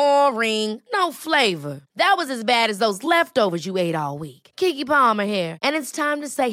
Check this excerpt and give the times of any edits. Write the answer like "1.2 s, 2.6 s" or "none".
none